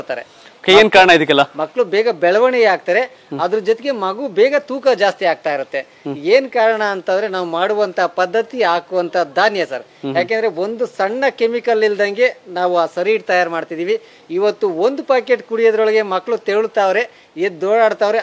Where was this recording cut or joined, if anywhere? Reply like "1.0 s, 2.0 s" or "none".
none